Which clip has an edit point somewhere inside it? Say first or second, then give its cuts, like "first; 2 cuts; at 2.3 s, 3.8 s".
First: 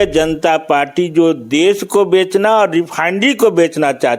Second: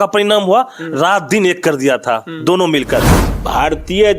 second; 1 cut; at 3.2 s